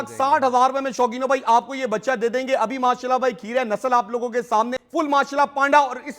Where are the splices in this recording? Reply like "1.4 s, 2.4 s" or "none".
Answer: 4.8 s